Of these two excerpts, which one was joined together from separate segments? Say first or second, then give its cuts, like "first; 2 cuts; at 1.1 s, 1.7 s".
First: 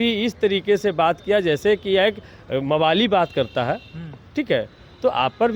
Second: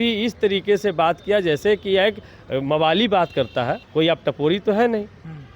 second; 1 cut; at 3.8 s